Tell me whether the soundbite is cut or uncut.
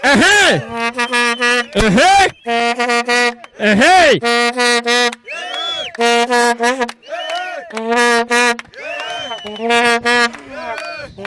uncut